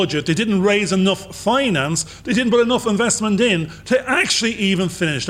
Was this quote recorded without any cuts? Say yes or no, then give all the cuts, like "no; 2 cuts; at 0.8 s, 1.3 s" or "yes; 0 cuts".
yes; 0 cuts